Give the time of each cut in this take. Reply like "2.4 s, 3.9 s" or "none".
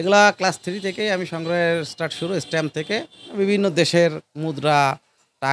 3.2 s